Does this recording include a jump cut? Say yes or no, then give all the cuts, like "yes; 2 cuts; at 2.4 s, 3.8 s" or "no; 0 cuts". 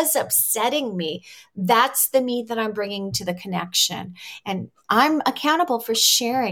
no; 0 cuts